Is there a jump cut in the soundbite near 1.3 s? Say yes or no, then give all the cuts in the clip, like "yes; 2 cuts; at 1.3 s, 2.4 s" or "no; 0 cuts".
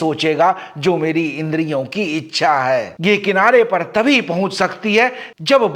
no; 1 cut; at 2.9 s